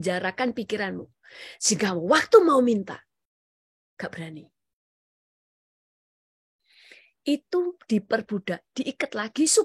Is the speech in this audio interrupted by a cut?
no; 0 cuts

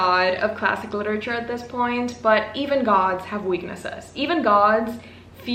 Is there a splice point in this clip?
no; 0 cuts

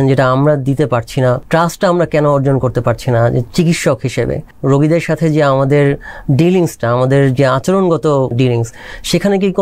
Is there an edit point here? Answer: yes; 3 cuts; at 1.4 s, 4.5 s, 8.3 s

